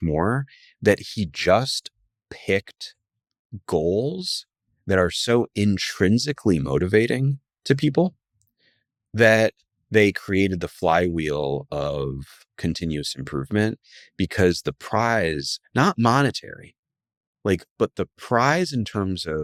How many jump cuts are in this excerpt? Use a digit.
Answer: 0